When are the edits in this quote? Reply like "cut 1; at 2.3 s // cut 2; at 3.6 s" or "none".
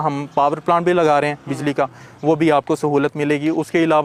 none